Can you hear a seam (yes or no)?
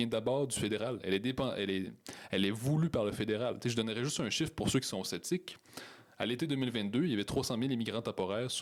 no